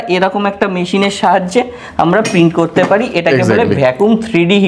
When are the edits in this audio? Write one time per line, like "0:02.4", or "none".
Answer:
none